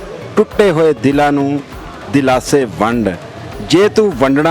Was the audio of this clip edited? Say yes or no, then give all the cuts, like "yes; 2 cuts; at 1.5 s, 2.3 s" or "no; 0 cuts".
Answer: no; 0 cuts